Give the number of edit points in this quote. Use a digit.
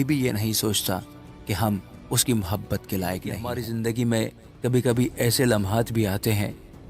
1